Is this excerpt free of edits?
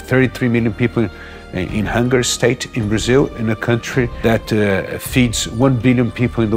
no; 1 cut; at 4.1 s

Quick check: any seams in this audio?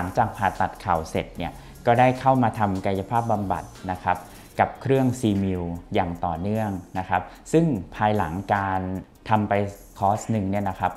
no; 0 cuts

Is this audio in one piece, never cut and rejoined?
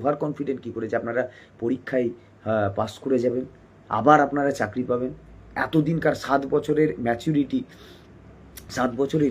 yes; 0 cuts

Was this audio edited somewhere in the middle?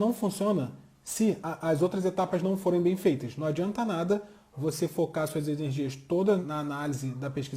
yes; 2 cuts; at 1.4 s, 6.4 s

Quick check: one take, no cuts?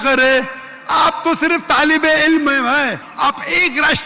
no; 1 cut; at 3.1 s

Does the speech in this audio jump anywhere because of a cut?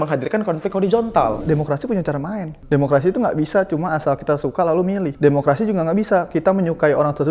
yes; 3 cuts; at 1.4 s, 2.5 s, 5.1 s

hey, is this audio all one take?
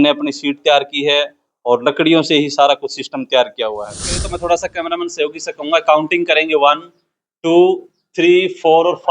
no; 1 cut; at 4.2 s

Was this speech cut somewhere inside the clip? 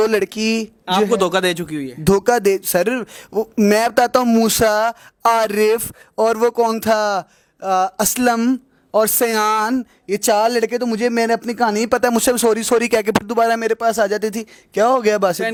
no; 0 cuts

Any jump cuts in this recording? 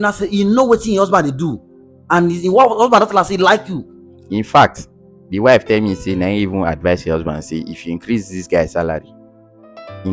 no; 0 cuts

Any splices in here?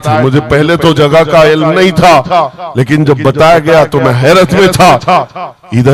no; 0 cuts

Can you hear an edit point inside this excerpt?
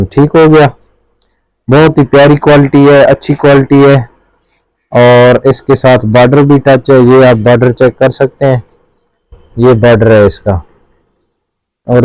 no; 0 cuts

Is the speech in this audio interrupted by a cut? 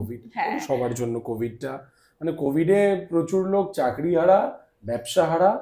no; 0 cuts

